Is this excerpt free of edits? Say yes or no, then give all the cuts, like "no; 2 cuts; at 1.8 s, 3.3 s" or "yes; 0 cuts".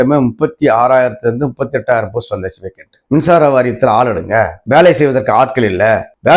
no; 1 cut; at 2.9 s